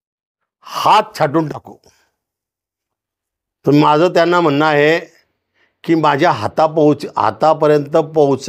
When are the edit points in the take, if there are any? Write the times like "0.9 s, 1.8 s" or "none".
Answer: none